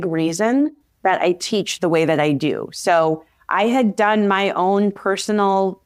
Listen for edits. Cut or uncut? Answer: uncut